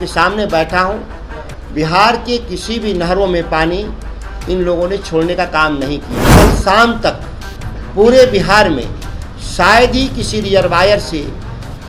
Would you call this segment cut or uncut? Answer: cut